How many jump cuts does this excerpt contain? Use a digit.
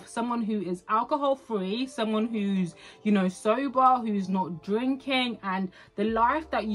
0